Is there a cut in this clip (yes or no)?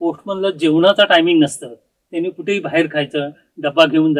no